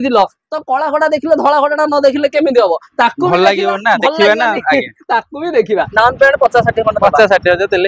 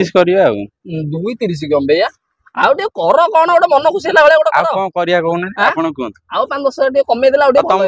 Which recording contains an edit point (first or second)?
first